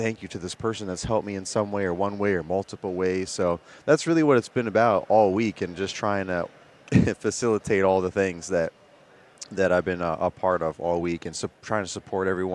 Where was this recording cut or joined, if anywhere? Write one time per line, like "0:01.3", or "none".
none